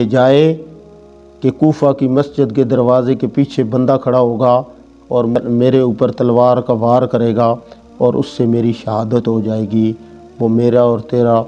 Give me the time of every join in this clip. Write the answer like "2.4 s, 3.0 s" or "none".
5.3 s